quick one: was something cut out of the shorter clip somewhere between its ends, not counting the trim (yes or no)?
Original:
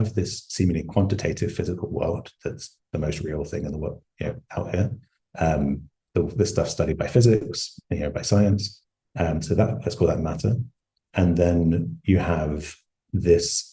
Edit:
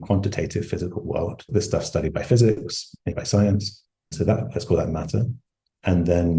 yes